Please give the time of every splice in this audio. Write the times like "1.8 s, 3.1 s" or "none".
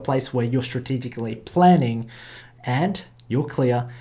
none